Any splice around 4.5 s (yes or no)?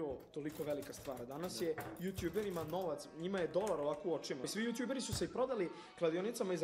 yes